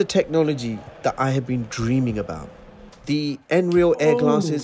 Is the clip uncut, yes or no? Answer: no